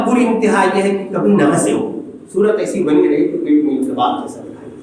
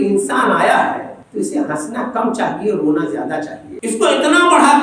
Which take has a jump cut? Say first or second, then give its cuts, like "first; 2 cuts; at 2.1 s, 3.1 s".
second; 2 cuts; at 1.2 s, 3.6 s